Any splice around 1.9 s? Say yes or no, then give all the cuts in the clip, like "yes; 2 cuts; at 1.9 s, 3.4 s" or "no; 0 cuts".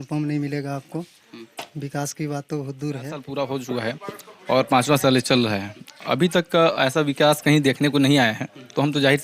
no; 1 cut; at 3.3 s